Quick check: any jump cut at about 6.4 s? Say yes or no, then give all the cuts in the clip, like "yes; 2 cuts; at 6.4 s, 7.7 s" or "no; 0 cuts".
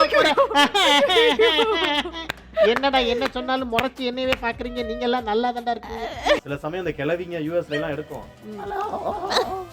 yes; 1 cut; at 6.4 s